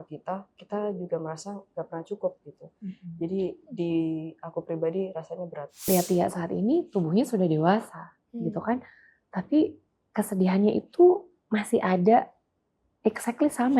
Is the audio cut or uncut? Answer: cut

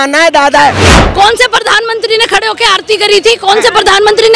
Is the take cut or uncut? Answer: cut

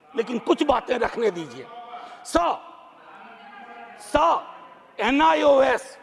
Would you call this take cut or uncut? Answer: uncut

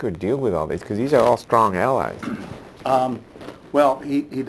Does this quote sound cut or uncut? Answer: cut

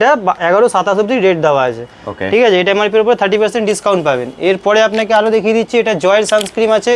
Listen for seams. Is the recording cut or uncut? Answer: uncut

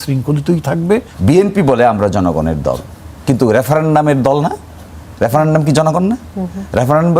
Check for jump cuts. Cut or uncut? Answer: cut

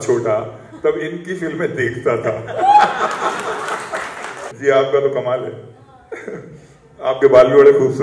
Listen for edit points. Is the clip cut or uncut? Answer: cut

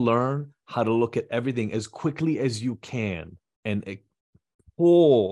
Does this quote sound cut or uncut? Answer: cut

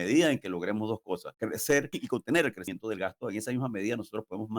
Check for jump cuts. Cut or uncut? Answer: cut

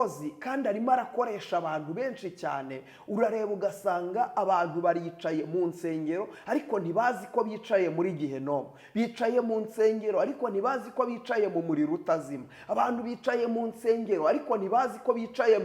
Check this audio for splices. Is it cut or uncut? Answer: uncut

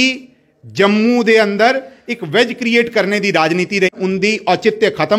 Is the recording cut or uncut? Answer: cut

